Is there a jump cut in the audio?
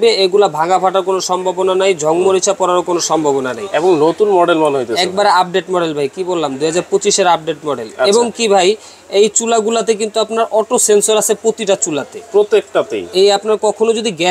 no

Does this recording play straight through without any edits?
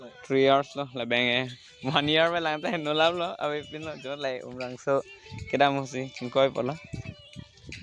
no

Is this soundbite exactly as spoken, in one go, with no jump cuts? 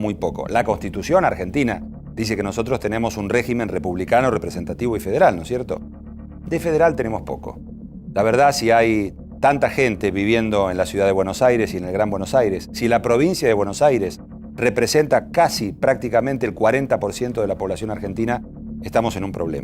no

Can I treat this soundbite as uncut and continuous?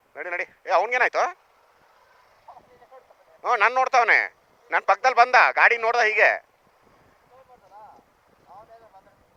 yes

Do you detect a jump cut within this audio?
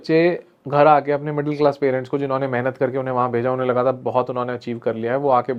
no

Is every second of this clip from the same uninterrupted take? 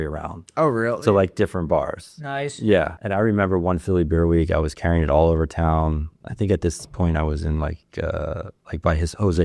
no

